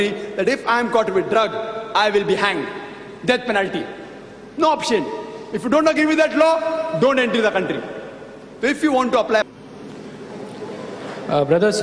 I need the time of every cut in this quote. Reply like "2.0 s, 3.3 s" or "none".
none